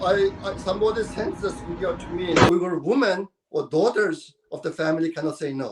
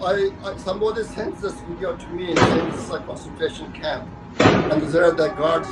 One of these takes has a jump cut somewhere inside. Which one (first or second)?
first